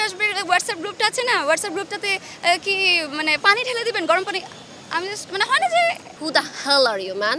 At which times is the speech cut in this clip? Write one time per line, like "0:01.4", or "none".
0:06.1